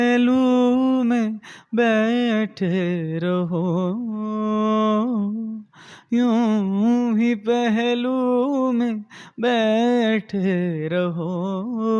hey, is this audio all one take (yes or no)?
yes